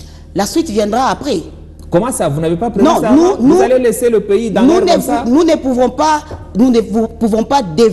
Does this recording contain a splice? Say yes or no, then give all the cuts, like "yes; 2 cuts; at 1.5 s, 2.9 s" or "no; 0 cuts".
no; 0 cuts